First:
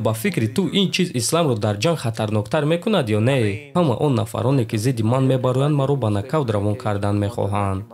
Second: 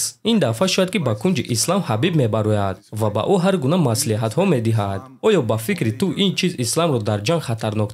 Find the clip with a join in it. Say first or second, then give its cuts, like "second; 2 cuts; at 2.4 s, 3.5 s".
first; 1 cut; at 3.7 s